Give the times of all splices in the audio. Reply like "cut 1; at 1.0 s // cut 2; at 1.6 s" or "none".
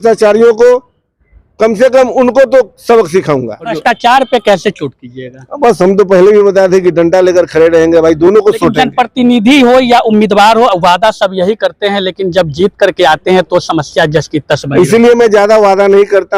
cut 1; at 3.7 s